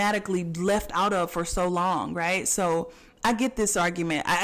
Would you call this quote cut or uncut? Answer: uncut